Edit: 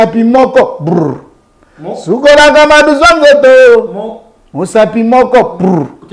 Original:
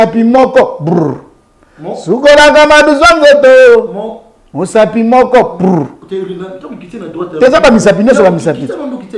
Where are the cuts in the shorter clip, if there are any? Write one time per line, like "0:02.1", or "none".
none